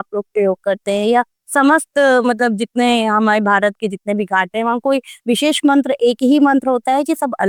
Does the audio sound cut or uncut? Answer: uncut